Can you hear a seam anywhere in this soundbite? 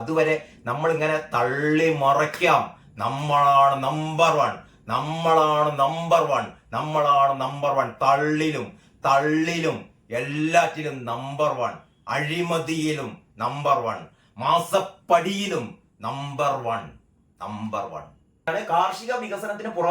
yes; 1 cut; at 18.5 s

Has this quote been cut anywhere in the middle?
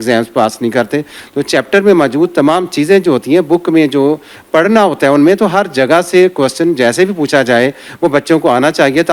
yes; 1 cut; at 1.2 s

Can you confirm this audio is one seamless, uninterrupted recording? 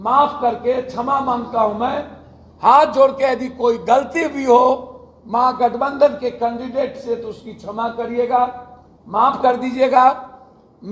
yes; 0 cuts

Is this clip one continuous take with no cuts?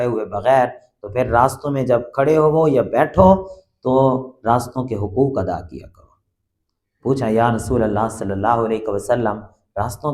yes; 0 cuts

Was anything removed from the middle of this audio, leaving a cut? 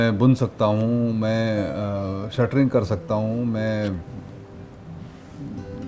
no; 0 cuts

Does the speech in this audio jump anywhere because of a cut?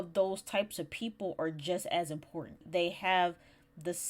yes; 1 cut; at 2.6 s

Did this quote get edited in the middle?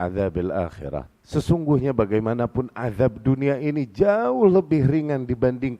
yes; 1 cut; at 1.2 s

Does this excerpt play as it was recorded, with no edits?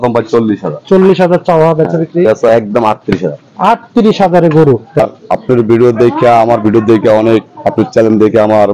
no; 1 cut; at 5.0 s

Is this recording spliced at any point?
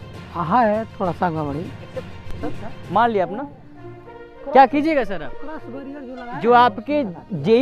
no; 0 cuts

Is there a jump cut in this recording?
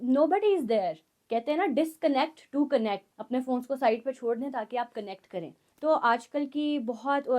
yes; 3 cuts; at 1.1 s, 3.1 s, 5.6 s

